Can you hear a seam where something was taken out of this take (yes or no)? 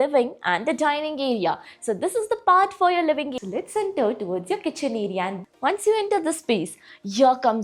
yes